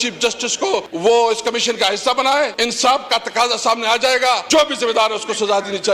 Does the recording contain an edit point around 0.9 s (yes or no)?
yes